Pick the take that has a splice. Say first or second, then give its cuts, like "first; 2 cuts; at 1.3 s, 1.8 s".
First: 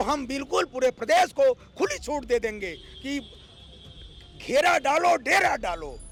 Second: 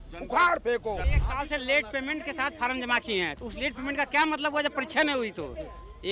second; 1 cut; at 1.1 s